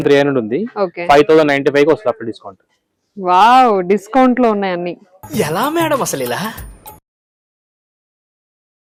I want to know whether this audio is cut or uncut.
uncut